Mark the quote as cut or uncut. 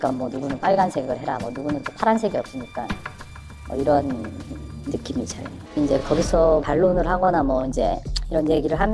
cut